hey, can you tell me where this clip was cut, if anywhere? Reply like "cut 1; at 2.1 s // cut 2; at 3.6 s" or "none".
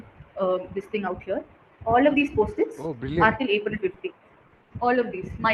none